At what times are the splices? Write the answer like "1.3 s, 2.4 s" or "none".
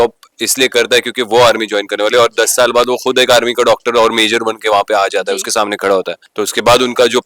6.2 s